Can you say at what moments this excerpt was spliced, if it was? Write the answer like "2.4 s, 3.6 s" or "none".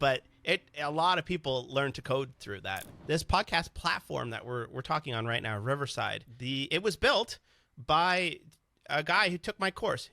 2.9 s